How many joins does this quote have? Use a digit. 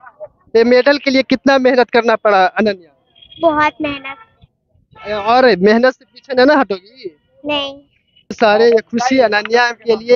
1